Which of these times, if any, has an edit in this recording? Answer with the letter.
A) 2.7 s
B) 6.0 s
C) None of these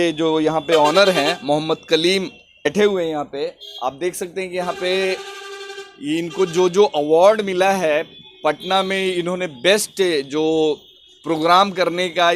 A